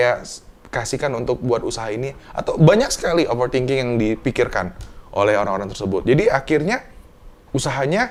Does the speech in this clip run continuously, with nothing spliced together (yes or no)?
yes